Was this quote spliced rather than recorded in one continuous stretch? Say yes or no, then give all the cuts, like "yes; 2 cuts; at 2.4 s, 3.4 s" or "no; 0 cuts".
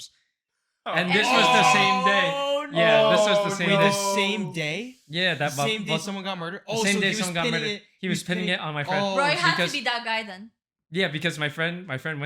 no; 0 cuts